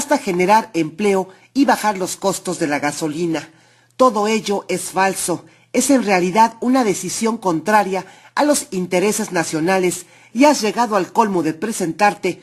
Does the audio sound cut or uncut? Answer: uncut